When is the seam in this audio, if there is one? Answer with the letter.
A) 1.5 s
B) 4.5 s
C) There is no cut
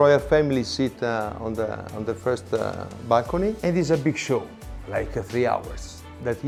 C